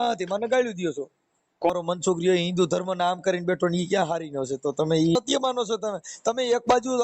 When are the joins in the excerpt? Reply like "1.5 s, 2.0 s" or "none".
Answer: 1.7 s, 5.1 s